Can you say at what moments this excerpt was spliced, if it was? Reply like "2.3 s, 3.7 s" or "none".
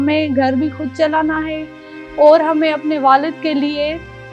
none